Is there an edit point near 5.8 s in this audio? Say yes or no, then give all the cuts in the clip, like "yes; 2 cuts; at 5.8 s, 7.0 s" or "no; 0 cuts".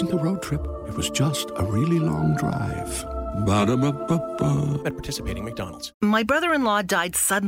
yes; 1 cut; at 5.8 s